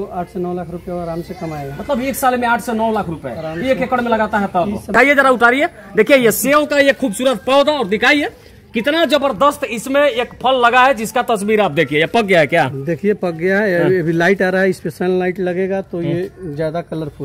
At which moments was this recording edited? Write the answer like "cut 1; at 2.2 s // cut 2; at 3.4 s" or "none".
cut 1; at 4.9 s